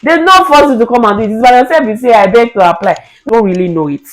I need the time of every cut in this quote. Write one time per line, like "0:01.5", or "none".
0:03.2